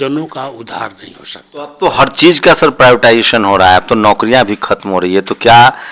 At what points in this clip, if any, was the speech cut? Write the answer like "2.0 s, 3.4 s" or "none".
1.7 s